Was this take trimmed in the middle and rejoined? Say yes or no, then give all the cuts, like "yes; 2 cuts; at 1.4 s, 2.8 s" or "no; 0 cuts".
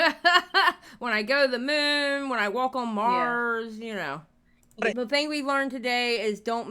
yes; 1 cut; at 4.9 s